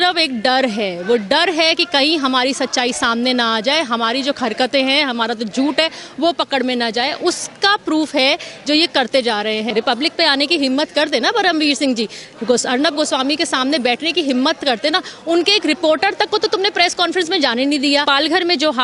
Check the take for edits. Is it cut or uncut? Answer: cut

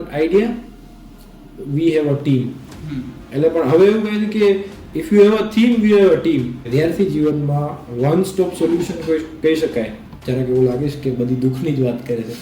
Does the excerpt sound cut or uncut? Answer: cut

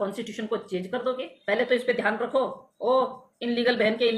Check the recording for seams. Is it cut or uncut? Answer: cut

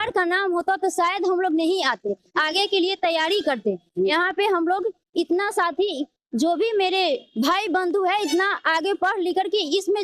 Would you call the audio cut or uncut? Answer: uncut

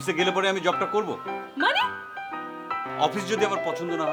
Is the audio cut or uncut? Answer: uncut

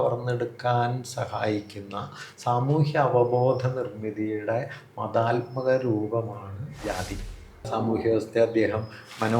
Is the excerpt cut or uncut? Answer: cut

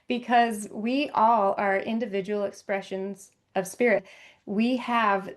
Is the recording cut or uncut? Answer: cut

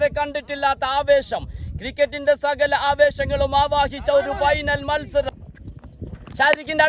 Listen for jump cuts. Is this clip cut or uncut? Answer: cut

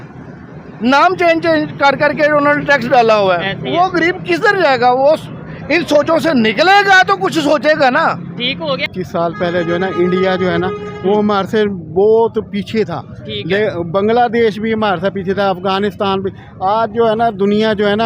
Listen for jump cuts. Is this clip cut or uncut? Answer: cut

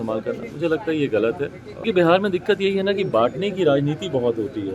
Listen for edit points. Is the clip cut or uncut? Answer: cut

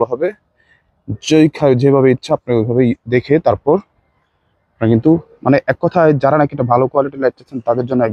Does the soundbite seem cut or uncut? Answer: uncut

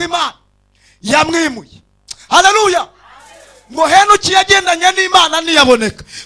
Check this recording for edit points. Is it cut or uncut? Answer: uncut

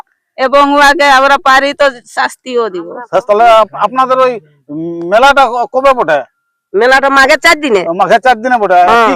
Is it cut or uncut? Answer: cut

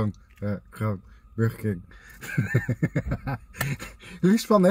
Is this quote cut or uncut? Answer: uncut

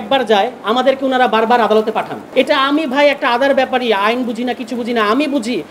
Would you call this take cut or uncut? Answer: cut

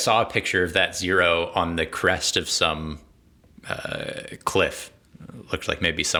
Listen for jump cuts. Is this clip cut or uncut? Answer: uncut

